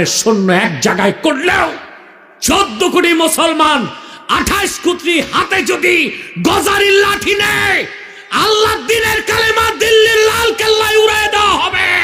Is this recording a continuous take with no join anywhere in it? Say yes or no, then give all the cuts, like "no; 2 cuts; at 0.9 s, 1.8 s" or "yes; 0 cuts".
yes; 0 cuts